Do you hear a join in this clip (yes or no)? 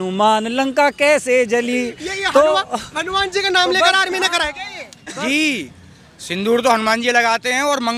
no